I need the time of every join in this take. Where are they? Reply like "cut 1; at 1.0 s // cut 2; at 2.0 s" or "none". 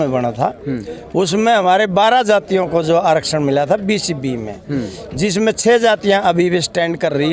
none